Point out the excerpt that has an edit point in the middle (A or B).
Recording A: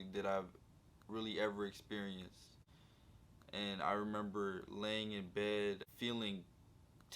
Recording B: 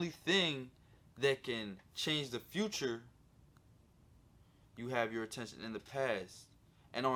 A